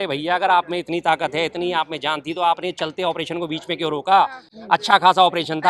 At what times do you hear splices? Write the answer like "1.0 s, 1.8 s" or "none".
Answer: none